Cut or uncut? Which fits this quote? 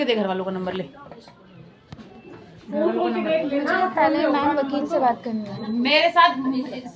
uncut